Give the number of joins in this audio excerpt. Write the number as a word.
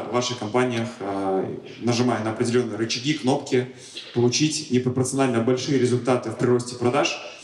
zero